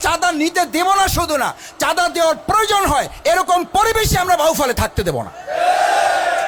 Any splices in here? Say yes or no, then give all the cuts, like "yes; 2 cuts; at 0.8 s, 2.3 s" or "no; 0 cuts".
no; 0 cuts